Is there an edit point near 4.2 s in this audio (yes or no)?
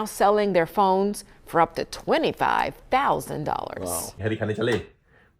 yes